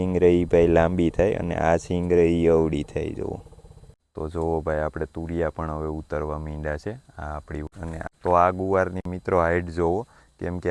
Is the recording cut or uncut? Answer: cut